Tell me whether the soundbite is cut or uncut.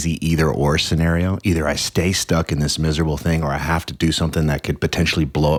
uncut